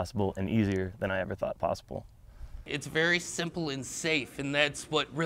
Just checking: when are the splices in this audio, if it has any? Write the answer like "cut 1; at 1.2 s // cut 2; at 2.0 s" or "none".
cut 1; at 2.7 s